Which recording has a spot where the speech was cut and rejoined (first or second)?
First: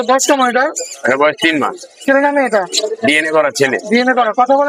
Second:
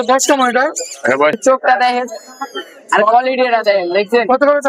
second